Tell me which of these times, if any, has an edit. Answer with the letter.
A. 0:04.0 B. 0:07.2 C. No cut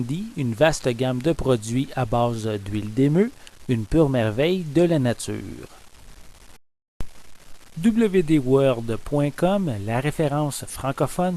B